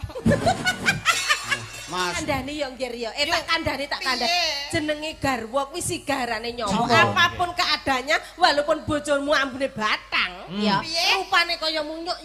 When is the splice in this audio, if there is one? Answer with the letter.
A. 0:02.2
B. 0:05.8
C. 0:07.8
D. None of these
A